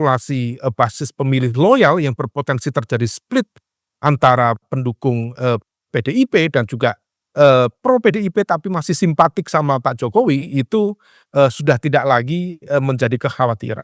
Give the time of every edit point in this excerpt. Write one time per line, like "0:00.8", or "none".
none